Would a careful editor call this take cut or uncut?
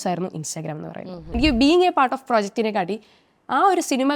cut